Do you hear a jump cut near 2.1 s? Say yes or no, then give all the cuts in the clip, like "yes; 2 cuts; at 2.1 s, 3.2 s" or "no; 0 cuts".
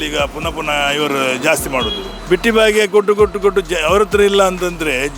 yes; 1 cut; at 2.1 s